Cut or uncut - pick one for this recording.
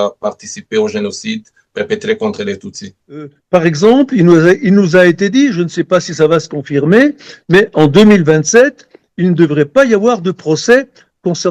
cut